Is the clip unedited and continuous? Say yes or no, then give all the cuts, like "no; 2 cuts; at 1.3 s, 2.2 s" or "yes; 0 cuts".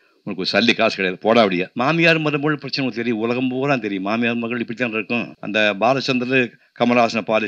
no; 2 cuts; at 1.7 s, 5.4 s